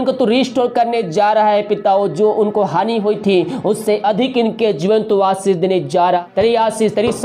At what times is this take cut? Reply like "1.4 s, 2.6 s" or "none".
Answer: 6.2 s